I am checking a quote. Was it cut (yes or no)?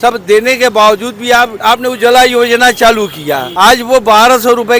yes